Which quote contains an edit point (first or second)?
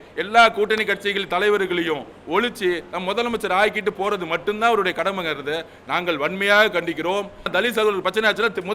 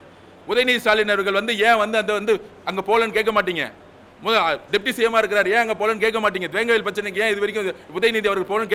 first